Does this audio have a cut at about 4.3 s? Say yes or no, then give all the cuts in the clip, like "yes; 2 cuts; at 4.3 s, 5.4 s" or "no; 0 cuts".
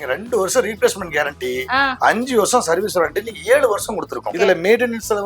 yes; 1 cut; at 4.3 s